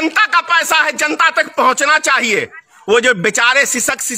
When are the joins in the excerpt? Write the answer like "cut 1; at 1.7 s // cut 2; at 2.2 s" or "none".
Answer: cut 1; at 2.7 s